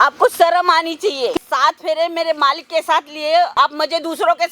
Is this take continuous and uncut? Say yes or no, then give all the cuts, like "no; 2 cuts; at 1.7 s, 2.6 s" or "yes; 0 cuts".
no; 2 cuts; at 1.4 s, 3.5 s